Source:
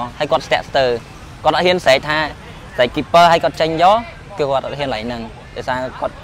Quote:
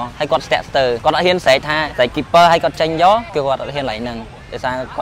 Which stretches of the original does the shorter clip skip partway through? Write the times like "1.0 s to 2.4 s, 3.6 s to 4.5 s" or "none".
1.0 s to 1.4 s, 2.3 s to 2.7 s, 4.1 s to 4.3 s